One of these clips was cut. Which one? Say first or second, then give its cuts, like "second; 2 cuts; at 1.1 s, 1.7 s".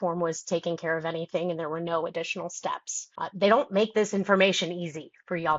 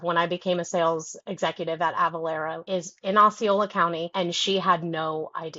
second; 2 cuts; at 2.6 s, 4.1 s